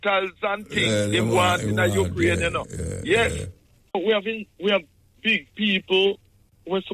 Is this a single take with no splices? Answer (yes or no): no